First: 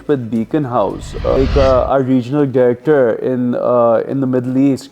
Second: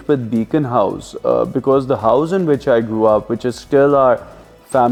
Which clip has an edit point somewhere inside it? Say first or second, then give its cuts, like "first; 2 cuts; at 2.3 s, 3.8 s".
first; 1 cut; at 1.4 s